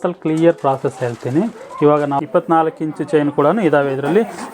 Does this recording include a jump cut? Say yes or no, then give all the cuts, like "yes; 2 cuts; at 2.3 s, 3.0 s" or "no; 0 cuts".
yes; 1 cut; at 2.2 s